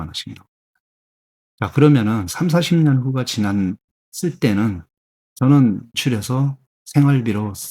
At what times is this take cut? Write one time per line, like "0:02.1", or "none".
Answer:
0:06.0